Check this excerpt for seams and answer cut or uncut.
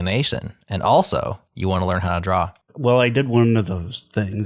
cut